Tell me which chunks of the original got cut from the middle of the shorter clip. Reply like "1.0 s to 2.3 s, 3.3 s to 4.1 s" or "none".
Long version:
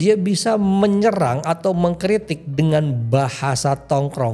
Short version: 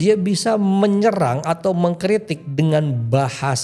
none